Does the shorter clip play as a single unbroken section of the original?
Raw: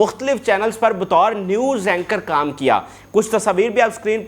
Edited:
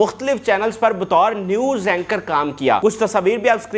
no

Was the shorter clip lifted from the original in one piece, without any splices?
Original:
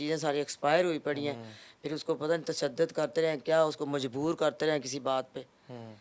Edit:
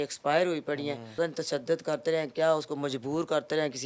no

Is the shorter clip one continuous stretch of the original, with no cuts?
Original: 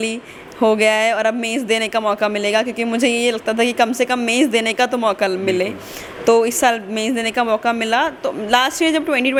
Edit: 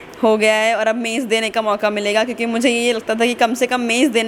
yes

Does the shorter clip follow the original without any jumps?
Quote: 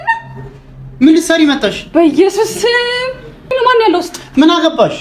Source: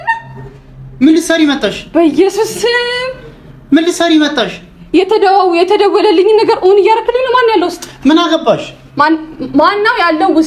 no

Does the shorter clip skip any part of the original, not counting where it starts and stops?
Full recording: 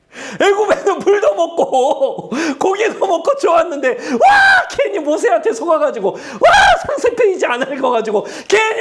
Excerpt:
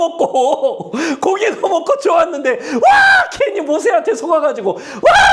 no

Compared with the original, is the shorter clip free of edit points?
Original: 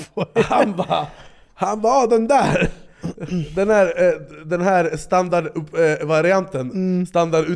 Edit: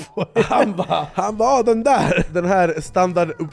no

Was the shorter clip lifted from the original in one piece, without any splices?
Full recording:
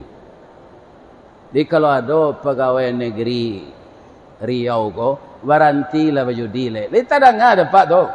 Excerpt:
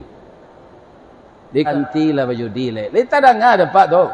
no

